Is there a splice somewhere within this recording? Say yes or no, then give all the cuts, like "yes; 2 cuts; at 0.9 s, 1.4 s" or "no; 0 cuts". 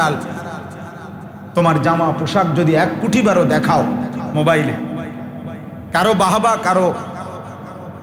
no; 0 cuts